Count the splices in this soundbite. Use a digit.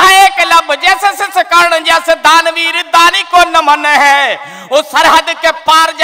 0